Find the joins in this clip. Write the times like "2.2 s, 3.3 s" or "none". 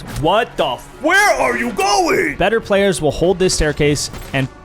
2.3 s